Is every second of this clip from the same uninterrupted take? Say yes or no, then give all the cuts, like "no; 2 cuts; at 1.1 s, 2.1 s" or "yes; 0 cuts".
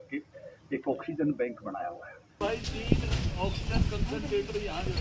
no; 1 cut; at 2.4 s